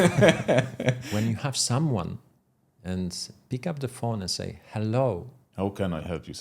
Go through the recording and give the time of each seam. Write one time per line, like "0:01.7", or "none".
0:01.0
0:05.4